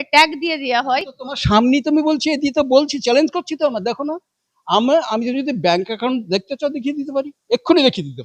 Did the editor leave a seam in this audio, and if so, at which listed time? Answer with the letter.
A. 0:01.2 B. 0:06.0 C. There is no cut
C